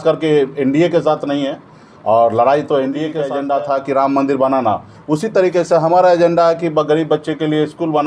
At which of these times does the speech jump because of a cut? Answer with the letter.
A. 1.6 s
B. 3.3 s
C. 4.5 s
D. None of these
B